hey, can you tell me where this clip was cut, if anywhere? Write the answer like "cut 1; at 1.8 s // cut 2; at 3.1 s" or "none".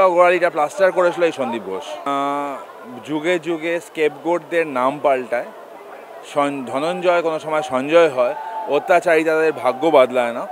none

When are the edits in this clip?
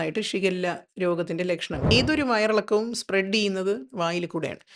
cut 1; at 1.9 s

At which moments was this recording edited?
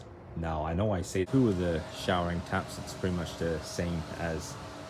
cut 1; at 1.3 s

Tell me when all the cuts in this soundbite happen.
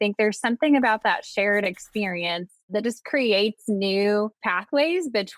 cut 1; at 2.7 s // cut 2; at 4.4 s

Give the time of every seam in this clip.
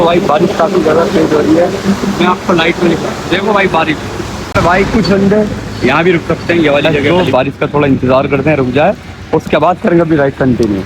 cut 1; at 4.5 s // cut 2; at 7.0 s

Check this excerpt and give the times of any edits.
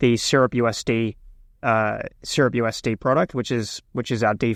none

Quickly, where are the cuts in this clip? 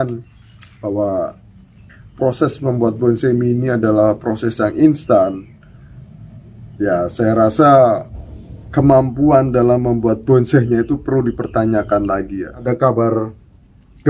cut 1; at 12.6 s

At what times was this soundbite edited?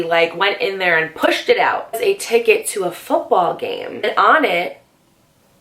cut 1; at 4.0 s

